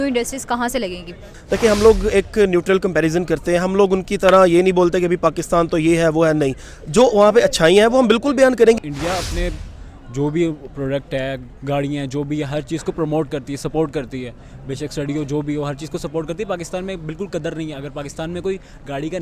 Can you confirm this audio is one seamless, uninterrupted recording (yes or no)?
no